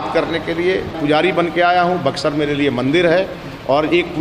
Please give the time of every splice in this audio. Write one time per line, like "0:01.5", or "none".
0:01.0